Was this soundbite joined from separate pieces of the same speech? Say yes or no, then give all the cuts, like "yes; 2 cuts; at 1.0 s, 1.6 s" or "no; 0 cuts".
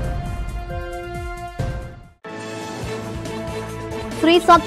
no; 0 cuts